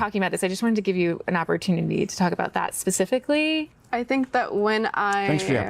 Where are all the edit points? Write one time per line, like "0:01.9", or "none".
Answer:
0:02.4